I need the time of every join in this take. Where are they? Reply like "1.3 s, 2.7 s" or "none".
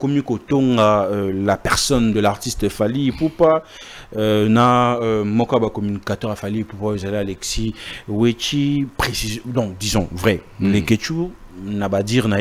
none